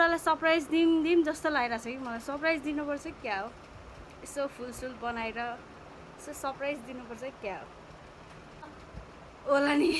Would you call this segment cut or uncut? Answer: cut